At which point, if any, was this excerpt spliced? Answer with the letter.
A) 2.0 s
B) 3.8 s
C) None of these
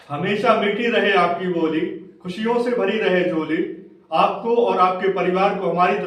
C